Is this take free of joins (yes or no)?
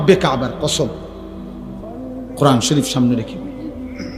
no